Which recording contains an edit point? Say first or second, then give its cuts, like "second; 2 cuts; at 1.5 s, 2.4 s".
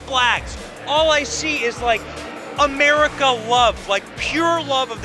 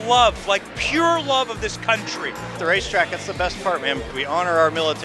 second; 2 cuts; at 2.6 s, 4.1 s